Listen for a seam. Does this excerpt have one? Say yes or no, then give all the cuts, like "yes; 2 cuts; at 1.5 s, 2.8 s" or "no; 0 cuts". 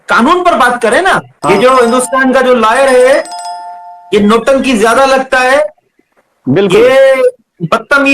yes; 1 cut; at 1.4 s